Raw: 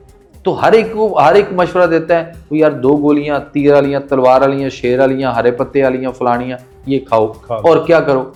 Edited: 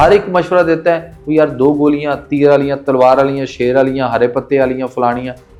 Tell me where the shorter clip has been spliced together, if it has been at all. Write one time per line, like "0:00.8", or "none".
none